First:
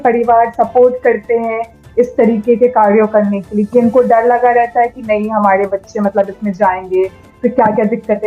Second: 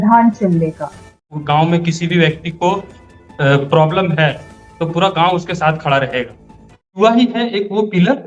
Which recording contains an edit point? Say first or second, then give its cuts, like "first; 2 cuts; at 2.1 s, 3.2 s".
second; 2 cuts; at 1.3 s, 7.0 s